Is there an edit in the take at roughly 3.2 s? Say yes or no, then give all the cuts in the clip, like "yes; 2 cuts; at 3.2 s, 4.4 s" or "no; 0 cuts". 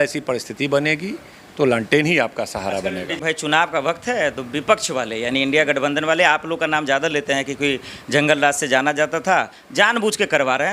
yes; 1 cut; at 3.2 s